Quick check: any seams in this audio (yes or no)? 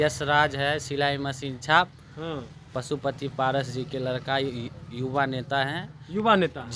no